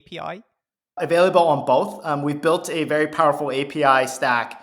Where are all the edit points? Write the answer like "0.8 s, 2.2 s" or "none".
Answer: 1.0 s

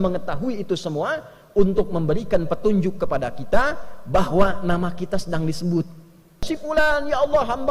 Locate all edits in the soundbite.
6.4 s

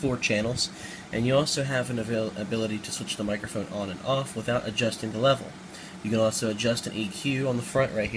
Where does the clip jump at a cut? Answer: none

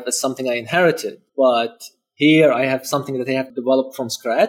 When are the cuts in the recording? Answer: 1.2 s, 3.5 s

